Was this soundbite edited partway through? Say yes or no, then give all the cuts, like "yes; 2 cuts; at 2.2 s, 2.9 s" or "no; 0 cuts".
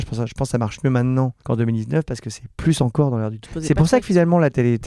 yes; 2 cuts; at 1.4 s, 3.4 s